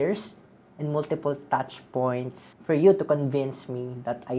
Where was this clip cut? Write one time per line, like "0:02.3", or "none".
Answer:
0:02.5